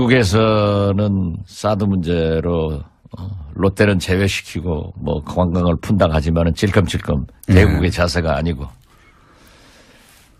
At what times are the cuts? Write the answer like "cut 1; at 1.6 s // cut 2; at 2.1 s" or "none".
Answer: cut 1; at 6.5 s